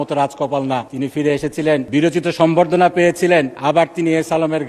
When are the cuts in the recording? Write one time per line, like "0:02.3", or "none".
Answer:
0:00.9
0:01.9
0:03.5